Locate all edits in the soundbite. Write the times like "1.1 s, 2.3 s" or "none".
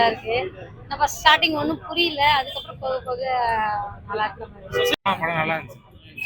4.9 s